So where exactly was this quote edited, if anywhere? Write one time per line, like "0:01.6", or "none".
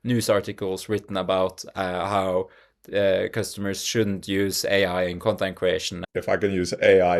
0:06.0

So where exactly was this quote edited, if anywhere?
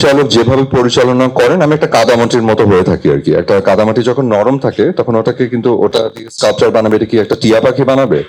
none

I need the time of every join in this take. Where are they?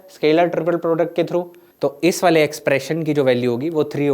0:01.6

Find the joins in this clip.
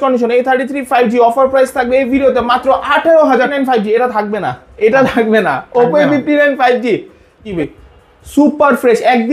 0:03.5
0:07.5

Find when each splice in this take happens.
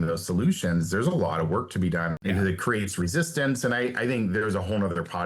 0:02.2

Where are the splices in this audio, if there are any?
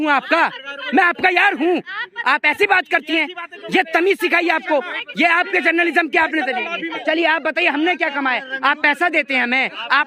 0:06.8

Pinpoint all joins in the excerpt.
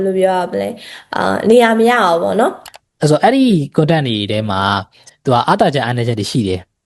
0:02.6

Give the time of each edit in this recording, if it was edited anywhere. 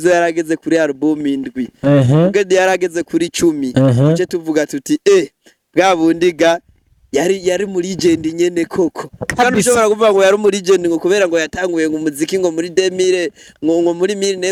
none

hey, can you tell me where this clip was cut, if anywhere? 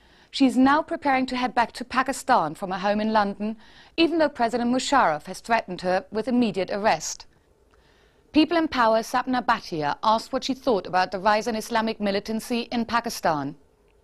none

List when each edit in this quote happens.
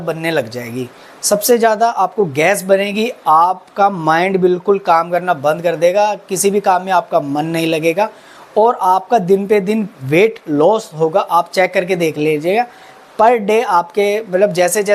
none

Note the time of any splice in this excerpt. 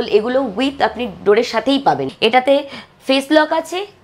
0:02.1

